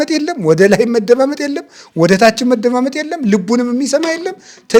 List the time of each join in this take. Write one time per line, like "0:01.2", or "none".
none